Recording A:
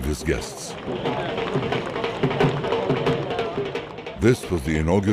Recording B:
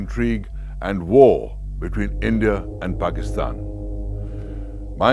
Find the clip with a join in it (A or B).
A